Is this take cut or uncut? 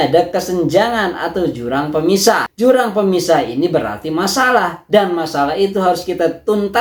uncut